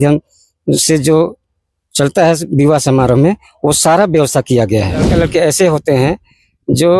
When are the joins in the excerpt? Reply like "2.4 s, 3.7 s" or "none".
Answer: 5.1 s